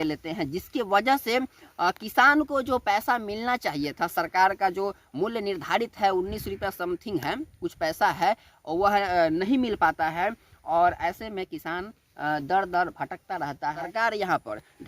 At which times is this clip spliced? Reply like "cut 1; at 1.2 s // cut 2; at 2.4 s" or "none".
cut 1; at 13.9 s

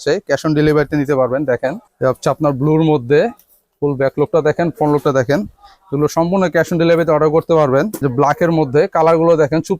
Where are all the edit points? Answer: cut 1; at 1.9 s // cut 2; at 8.0 s

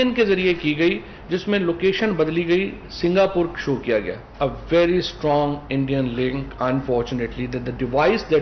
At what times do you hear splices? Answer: cut 1; at 4.2 s

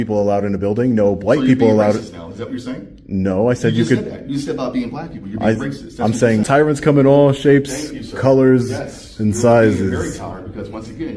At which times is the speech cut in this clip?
cut 1; at 6.4 s

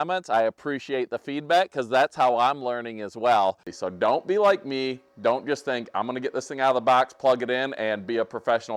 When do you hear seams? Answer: cut 1; at 3.7 s

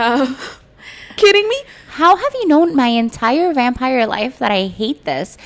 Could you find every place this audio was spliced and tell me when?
cut 1; at 1.2 s

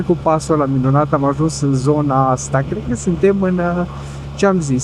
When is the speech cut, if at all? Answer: none

